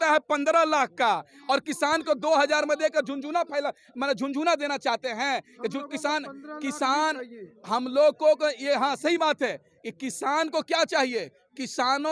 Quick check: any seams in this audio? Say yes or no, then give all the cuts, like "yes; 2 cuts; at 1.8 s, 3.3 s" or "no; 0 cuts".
no; 0 cuts